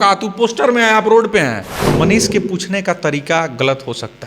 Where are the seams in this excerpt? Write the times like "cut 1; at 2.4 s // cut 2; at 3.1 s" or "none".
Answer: cut 1; at 1.9 s